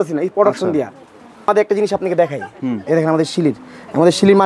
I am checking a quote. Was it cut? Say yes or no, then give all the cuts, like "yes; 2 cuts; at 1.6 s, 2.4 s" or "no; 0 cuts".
yes; 1 cut; at 1.5 s